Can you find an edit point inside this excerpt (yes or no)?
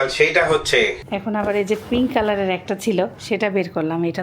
yes